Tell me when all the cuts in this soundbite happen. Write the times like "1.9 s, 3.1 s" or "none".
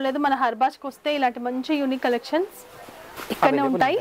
none